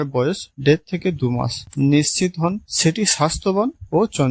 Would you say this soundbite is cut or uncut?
uncut